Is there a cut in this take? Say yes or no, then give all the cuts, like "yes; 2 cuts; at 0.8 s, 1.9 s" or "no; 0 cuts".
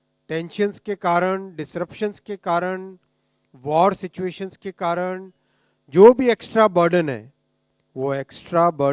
no; 0 cuts